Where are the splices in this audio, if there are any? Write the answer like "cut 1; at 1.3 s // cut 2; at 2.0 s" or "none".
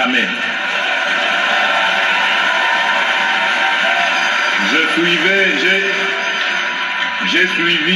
none